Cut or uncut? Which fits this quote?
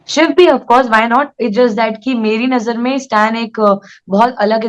uncut